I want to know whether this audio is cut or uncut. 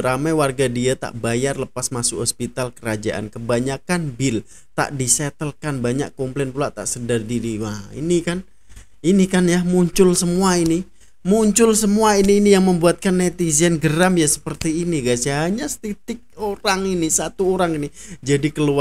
uncut